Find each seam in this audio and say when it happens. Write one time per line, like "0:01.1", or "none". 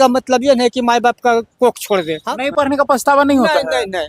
0:02.2